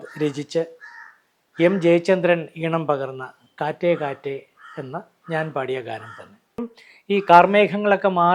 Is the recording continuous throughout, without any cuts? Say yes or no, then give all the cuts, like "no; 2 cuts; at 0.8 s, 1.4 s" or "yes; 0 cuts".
no; 1 cut; at 6.7 s